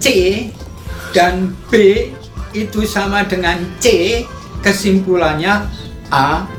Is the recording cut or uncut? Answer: uncut